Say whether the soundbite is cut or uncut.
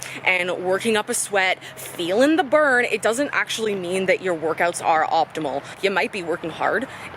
cut